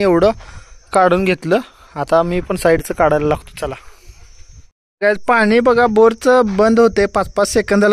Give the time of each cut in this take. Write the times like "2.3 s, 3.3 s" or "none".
none